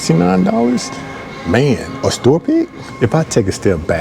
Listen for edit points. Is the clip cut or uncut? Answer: cut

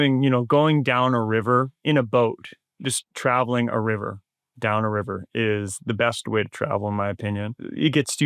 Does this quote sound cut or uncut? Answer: uncut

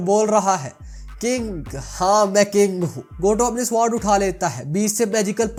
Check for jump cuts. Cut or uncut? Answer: uncut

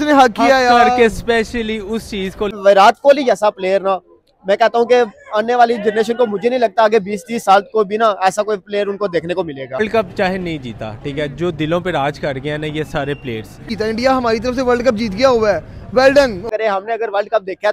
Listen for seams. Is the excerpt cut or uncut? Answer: cut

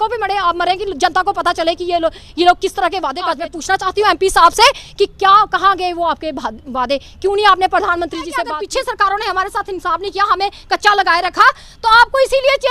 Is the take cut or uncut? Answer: cut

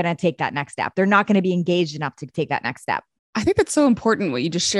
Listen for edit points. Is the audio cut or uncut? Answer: cut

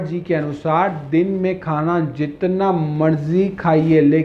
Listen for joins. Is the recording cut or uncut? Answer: uncut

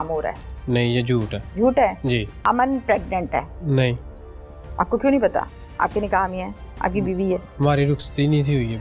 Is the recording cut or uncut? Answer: cut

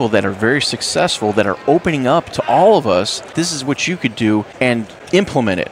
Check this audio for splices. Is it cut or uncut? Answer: cut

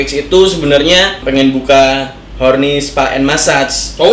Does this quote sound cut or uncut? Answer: cut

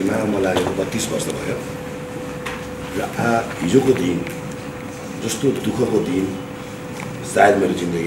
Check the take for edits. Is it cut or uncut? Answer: uncut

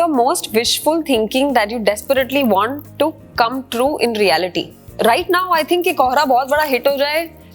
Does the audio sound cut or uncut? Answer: cut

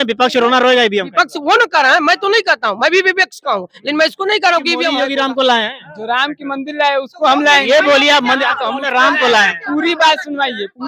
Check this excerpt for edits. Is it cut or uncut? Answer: cut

